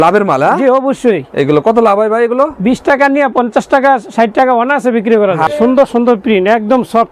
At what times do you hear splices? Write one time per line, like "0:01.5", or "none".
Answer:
0:05.5